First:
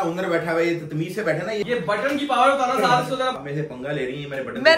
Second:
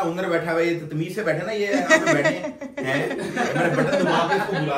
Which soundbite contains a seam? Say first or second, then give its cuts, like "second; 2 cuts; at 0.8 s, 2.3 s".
first; 2 cuts; at 1.6 s, 3.4 s